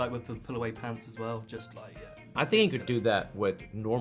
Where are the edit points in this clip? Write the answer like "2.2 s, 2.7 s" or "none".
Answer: 2.3 s